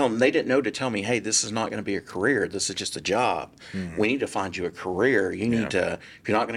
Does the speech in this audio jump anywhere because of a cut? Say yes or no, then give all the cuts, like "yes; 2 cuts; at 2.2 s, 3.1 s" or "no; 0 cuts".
no; 0 cuts